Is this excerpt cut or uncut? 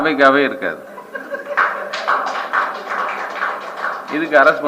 cut